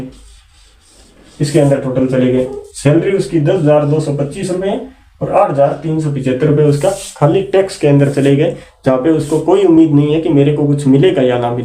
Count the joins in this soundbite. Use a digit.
0